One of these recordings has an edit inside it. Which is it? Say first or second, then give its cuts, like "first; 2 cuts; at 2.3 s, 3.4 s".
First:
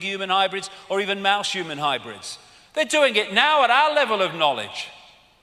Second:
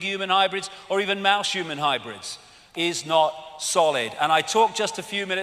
first; 1 cut; at 2.7 s